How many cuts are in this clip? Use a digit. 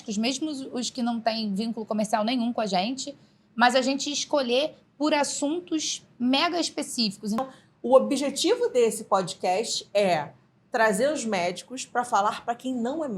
1